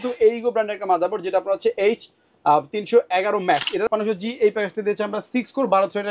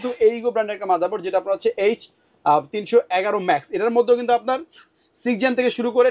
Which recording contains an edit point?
first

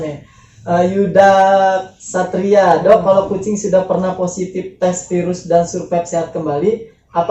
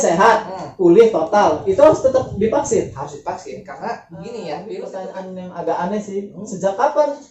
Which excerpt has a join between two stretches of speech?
second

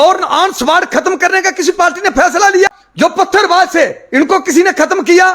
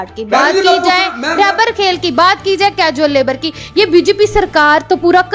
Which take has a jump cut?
first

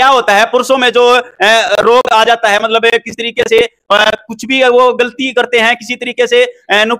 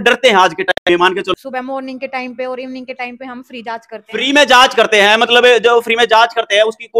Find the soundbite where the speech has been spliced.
second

